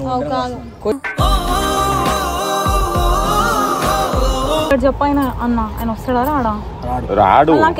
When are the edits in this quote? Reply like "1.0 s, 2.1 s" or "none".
4.7 s